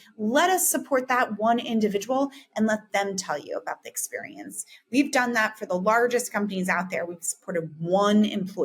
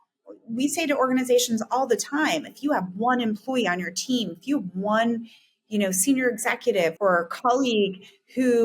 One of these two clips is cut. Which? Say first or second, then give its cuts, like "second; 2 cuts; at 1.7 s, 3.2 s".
second; 1 cut; at 6.9 s